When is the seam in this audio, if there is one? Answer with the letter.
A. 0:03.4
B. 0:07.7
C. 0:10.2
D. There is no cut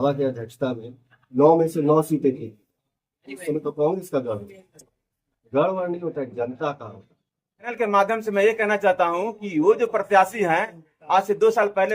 B